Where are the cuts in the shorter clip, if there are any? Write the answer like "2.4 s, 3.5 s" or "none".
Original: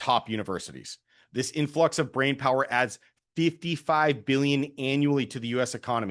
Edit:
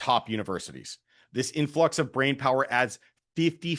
none